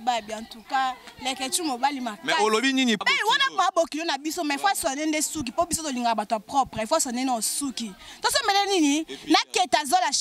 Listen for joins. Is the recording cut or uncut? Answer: cut